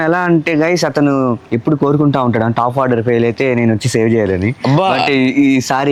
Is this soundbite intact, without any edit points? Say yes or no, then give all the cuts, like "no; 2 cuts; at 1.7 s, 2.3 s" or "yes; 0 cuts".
yes; 0 cuts